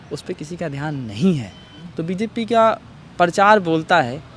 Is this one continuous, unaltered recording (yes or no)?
no